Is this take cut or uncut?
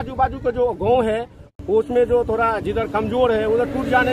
cut